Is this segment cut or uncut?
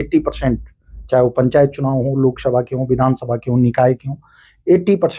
uncut